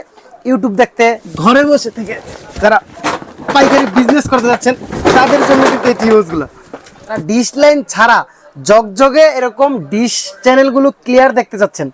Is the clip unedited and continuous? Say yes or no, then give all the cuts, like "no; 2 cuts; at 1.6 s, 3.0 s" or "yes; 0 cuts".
no; 2 cuts; at 1.3 s, 7.2 s